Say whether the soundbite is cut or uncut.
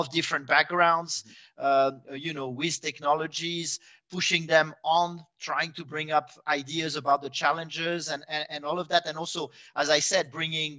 uncut